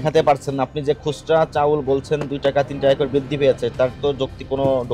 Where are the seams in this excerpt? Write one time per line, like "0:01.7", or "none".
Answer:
none